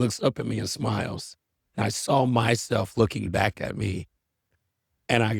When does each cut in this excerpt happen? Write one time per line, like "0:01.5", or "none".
none